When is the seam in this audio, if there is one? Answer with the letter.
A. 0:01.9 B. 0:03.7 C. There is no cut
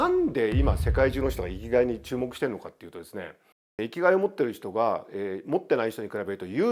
B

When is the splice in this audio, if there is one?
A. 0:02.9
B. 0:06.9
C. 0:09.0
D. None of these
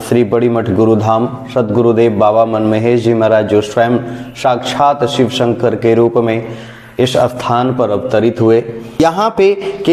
C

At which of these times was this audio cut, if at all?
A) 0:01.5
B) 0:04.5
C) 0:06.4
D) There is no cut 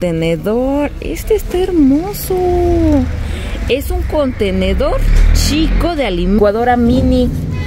C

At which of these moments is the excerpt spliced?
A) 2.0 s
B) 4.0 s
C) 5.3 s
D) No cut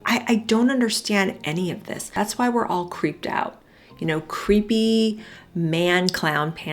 A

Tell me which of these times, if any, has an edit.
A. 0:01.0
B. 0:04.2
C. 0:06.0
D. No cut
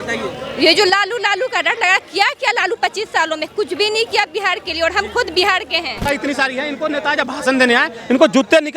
C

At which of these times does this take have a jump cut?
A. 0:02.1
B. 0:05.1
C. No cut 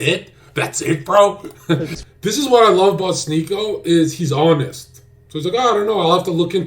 A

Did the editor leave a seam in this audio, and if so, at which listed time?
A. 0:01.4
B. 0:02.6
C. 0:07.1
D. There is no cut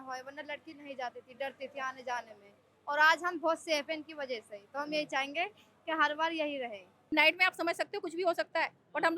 C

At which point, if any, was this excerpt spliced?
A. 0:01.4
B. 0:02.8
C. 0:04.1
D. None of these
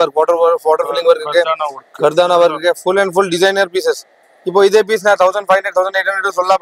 D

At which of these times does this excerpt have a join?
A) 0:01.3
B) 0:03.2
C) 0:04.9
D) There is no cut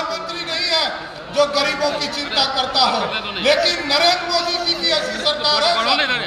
D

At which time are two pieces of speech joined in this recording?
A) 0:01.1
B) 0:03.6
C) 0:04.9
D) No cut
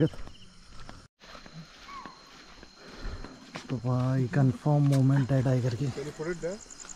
A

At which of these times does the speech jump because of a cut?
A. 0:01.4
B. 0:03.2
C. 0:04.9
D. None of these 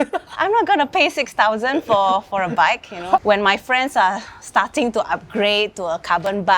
B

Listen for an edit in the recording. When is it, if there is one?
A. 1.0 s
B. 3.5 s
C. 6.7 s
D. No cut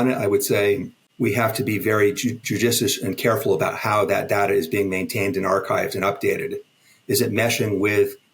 A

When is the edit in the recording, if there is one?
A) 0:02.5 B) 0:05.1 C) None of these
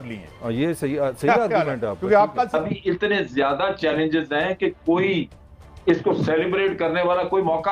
A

